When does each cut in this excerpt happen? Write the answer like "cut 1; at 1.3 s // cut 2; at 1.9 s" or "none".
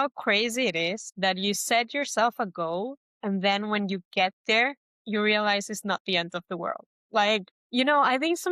cut 1; at 1.1 s // cut 2; at 3.1 s // cut 3; at 4.9 s // cut 4; at 7.6 s